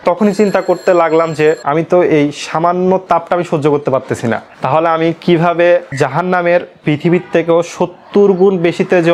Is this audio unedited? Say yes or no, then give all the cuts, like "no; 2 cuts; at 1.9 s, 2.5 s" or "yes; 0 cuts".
yes; 0 cuts